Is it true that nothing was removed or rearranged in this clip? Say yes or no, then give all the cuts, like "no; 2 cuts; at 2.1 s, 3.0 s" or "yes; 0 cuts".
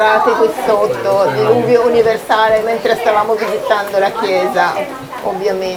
yes; 0 cuts